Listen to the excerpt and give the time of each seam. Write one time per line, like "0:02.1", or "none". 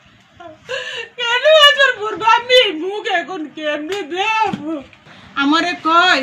0:05.0